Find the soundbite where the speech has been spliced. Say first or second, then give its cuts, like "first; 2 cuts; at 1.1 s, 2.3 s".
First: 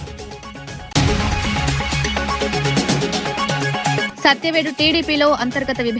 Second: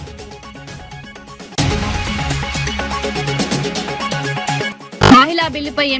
first; 3 cuts; at 0.9 s, 2.3 s, 3.6 s